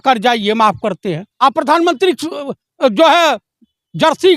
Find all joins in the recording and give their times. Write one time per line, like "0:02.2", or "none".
0:01.3